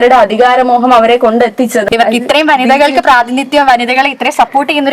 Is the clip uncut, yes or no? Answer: no